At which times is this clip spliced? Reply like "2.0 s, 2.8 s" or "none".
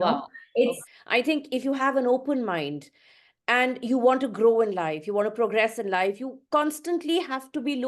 0.9 s